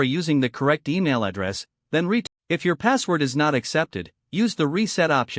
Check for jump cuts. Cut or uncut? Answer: cut